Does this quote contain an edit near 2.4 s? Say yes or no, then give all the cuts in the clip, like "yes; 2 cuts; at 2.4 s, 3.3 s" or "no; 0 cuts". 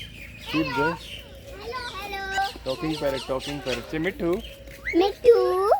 yes; 1 cut; at 2.4 s